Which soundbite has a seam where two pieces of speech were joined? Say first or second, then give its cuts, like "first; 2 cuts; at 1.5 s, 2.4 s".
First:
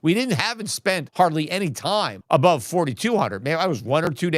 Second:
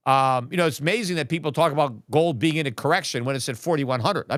first; 2 cuts; at 1.1 s, 2.2 s